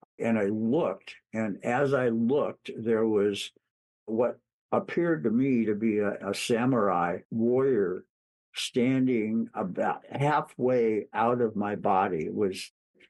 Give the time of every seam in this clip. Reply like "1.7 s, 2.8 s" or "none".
6.2 s, 7.2 s